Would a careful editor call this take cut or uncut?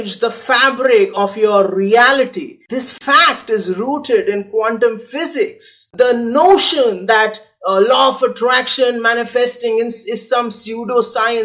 cut